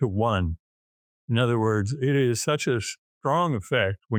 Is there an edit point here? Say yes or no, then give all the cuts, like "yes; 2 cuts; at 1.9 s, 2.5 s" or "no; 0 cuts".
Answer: no; 0 cuts